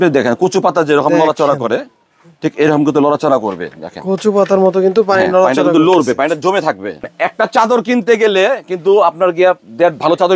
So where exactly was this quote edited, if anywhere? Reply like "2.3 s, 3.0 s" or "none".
7.1 s

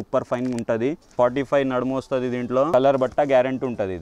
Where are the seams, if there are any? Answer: 1.0 s, 2.7 s

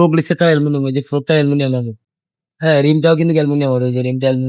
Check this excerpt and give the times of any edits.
none

